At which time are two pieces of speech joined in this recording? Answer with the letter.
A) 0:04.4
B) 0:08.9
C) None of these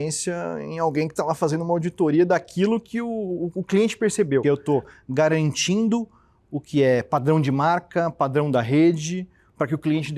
A